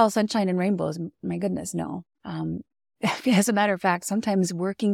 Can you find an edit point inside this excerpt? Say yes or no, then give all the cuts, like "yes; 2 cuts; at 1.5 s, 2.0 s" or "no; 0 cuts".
yes; 1 cut; at 1.1 s